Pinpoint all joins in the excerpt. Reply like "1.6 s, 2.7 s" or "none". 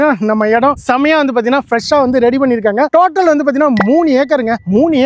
none